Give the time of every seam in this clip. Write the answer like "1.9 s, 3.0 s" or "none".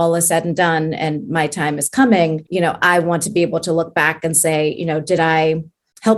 none